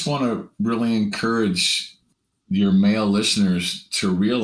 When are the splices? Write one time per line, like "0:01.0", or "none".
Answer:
none